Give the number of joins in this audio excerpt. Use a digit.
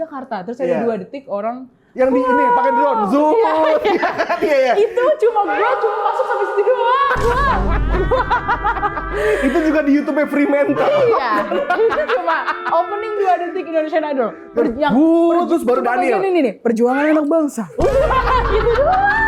0